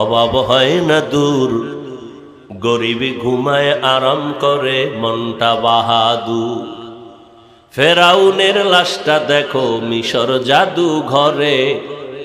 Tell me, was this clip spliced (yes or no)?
no